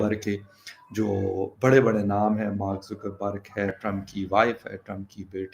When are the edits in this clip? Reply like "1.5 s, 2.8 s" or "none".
3.7 s